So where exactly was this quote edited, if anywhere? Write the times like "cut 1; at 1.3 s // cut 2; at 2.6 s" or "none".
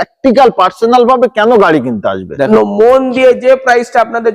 cut 1; at 2.5 s